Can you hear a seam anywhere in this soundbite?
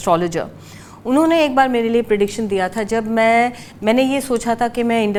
no; 0 cuts

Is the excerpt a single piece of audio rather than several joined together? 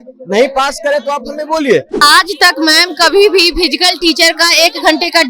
no; 1 cut; at 1.9 s

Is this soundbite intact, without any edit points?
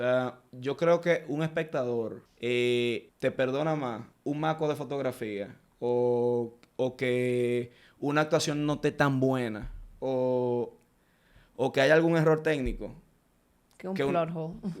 no; 3 cuts; at 2.2 s, 3.1 s, 4.1 s

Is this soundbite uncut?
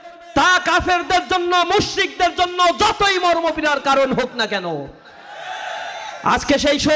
yes; 0 cuts

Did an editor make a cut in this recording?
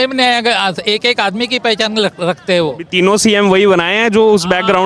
no; 0 cuts

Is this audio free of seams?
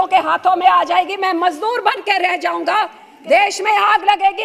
no; 1 cut; at 3.1 s

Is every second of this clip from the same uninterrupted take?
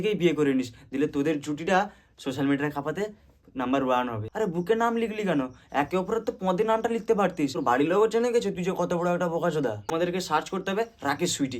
no; 3 cuts; at 4.2 s, 7.6 s, 9.9 s

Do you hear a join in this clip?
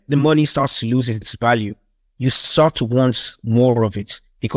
no; 0 cuts

